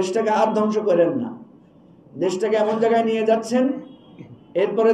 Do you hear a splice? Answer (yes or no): no